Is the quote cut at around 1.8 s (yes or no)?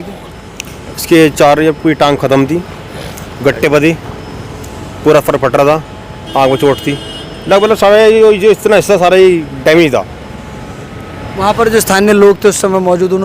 no